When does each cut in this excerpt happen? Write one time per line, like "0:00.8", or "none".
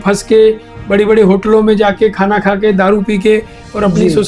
none